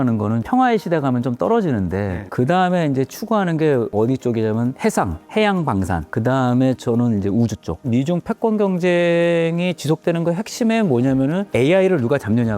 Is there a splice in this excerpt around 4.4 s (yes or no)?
no